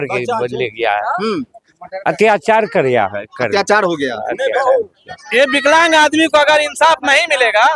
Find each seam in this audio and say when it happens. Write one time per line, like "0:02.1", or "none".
0:05.2